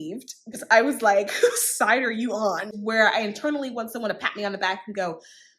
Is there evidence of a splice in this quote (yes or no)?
yes